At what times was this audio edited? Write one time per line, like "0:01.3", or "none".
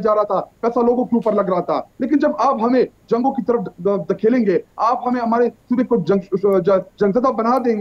none